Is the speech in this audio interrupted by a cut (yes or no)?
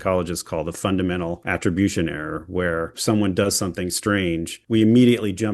yes